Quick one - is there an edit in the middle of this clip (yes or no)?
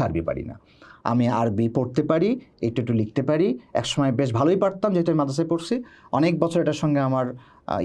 no